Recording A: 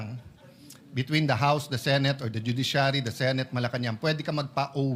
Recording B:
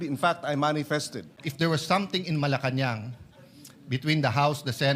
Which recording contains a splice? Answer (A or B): B